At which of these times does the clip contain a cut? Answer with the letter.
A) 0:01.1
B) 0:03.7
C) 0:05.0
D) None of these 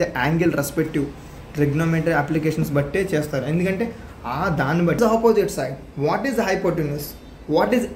C